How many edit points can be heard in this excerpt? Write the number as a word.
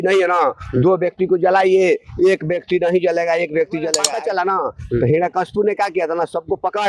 one